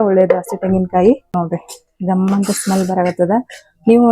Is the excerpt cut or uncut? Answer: cut